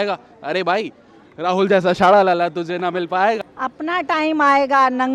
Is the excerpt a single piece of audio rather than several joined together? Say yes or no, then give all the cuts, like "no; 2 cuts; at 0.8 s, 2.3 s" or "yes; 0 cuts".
no; 1 cut; at 3.4 s